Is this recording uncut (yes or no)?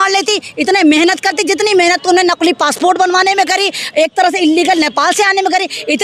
yes